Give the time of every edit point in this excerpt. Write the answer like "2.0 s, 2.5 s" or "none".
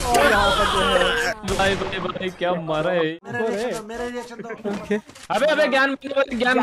3.2 s